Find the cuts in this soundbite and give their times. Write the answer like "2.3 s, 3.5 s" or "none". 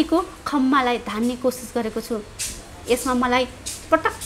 none